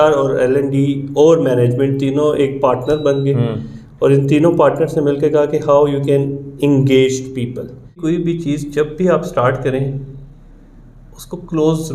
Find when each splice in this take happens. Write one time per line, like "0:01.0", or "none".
0:08.0